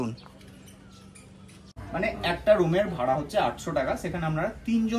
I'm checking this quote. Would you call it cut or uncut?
cut